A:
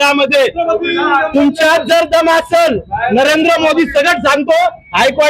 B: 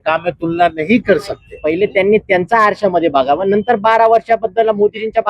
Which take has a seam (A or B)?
B